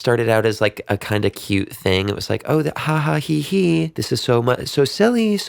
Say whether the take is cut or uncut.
cut